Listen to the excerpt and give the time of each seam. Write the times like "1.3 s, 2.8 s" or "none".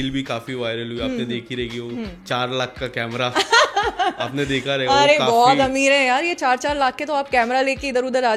none